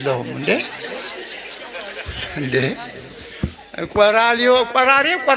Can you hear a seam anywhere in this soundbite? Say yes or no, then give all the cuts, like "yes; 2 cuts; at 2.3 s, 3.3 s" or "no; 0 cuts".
no; 0 cuts